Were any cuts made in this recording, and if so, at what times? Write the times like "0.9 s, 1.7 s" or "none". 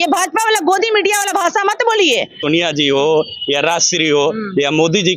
2.4 s